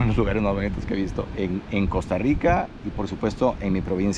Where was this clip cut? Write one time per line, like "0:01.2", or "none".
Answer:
0:01.3